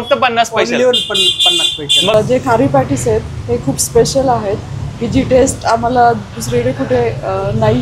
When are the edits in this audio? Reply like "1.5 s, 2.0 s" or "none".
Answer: 2.1 s